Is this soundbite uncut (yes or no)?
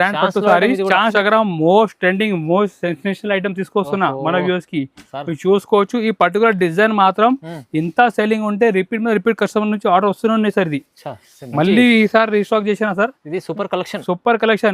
no